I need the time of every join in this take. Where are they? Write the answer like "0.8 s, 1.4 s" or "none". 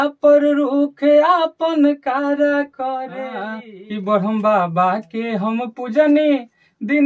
3.6 s